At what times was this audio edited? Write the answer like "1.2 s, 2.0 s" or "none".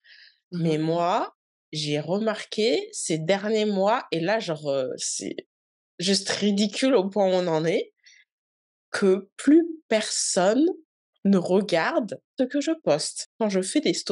12.3 s, 13.2 s